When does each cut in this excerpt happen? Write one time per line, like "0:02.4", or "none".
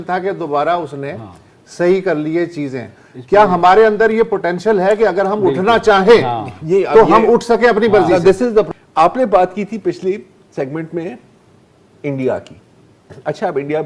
0:08.7